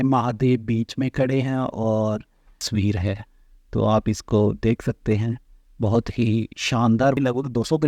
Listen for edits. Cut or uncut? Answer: cut